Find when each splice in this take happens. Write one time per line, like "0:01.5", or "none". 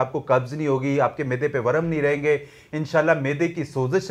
none